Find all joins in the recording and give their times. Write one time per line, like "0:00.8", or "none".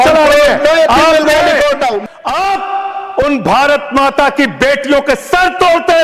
0:02.1